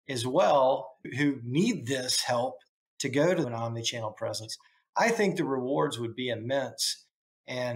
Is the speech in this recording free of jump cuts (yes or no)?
no